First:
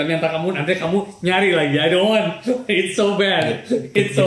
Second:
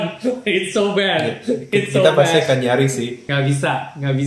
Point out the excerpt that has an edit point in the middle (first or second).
second